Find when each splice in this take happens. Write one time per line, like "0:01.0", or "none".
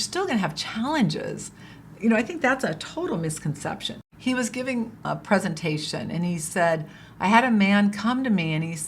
0:04.1
0:05.0